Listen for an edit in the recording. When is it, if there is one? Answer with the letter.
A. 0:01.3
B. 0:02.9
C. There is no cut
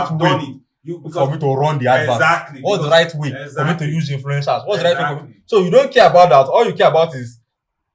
C